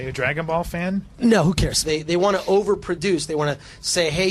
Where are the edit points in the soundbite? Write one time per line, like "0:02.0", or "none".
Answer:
0:01.8

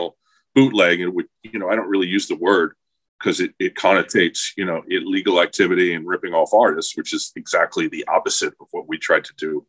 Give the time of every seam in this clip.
none

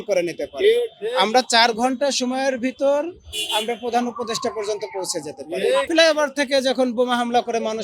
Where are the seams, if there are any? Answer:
0:05.9

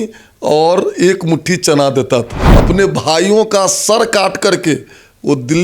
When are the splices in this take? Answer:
0:02.4

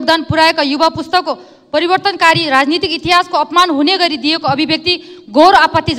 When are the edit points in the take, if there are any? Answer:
none

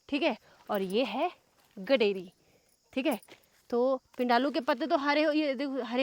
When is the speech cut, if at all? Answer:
none

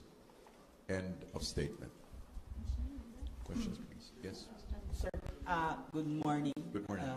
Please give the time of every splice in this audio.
none

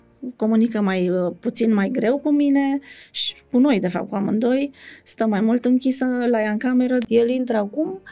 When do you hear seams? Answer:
0:07.0

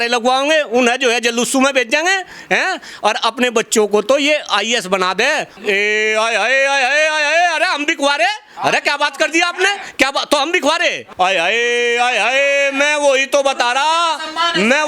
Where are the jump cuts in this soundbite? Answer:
0:05.5
0:11.1

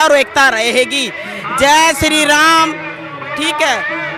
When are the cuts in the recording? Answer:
none

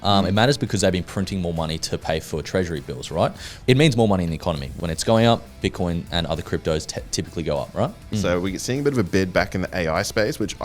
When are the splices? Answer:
0:03.5
0:04.7
0:08.1

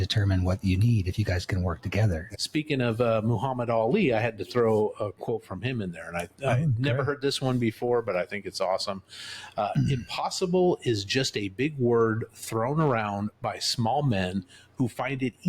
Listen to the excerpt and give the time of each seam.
0:02.3

